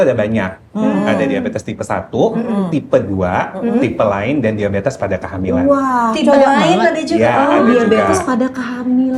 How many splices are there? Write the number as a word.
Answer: zero